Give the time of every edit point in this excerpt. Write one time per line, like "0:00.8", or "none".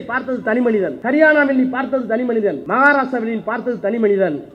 0:01.0
0:02.6